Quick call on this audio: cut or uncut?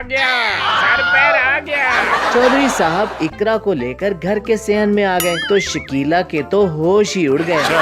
uncut